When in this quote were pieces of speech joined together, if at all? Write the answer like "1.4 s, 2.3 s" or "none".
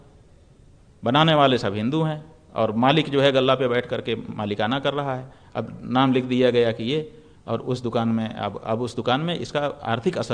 none